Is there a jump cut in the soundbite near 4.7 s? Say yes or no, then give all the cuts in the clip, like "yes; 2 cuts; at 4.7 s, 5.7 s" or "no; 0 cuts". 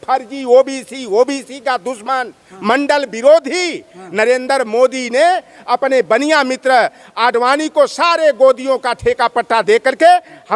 no; 0 cuts